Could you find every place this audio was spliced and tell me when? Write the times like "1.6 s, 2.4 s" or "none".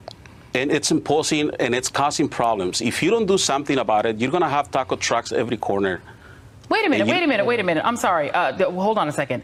none